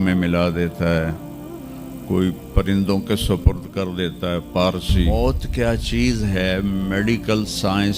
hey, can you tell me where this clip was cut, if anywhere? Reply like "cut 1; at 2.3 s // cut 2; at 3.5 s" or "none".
cut 1; at 5.1 s